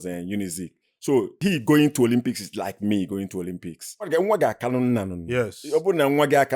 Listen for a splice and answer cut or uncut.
cut